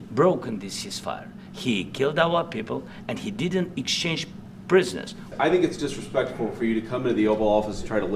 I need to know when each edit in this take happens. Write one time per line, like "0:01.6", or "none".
0:05.3